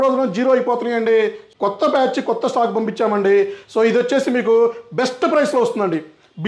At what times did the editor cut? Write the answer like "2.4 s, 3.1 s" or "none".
1.5 s